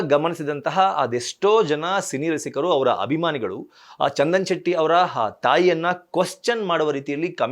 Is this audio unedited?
yes; 0 cuts

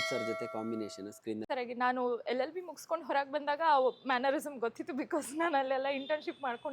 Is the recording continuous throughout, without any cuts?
no; 1 cut; at 1.4 s

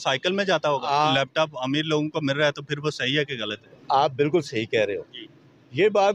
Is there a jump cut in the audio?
yes; 2 cuts; at 1.1 s, 3.7 s

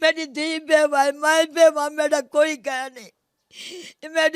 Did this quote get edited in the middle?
no; 0 cuts

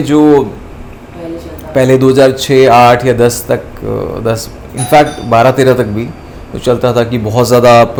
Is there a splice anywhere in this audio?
no; 0 cuts

